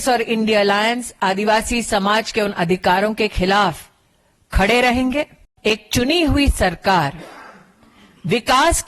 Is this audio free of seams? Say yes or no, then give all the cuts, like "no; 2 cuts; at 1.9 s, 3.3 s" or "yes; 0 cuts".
no; 1 cut; at 5.4 s